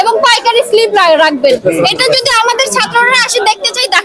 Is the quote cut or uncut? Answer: uncut